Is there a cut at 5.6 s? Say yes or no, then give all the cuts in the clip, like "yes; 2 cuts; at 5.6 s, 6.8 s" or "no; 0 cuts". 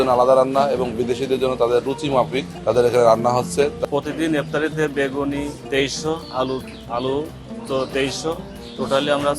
yes; 3 cuts; at 2.5 s, 3.8 s, 5.6 s